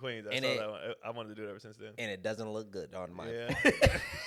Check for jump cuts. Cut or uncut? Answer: uncut